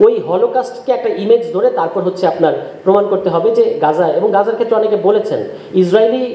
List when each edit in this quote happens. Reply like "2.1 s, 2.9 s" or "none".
none